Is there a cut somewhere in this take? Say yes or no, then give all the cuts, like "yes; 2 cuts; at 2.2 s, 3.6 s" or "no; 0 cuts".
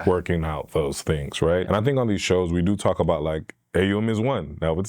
yes; 1 cut; at 1.6 s